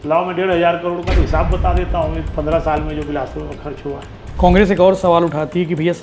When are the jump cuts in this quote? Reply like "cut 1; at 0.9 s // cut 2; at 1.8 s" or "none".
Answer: cut 1; at 4.2 s